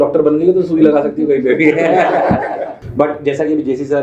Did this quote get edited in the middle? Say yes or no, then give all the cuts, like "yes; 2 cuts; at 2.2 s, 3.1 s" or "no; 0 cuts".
yes; 1 cut; at 2.8 s